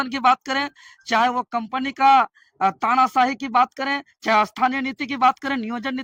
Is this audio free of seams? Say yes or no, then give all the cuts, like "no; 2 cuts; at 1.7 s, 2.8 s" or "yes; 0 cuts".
yes; 0 cuts